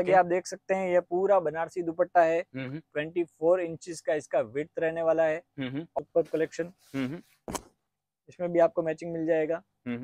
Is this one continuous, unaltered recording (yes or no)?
no